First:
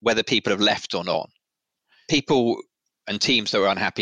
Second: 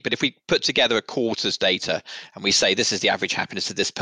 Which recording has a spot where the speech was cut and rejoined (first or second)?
first